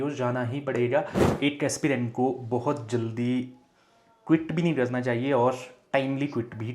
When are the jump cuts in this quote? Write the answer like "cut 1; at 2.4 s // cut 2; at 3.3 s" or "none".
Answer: cut 1; at 1.2 s